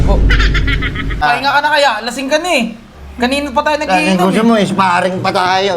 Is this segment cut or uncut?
cut